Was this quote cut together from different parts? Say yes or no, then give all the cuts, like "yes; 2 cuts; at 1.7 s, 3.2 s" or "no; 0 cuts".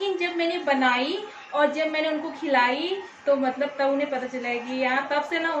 no; 0 cuts